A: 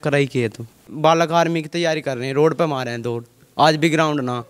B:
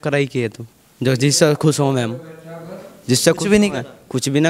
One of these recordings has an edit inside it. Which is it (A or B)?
A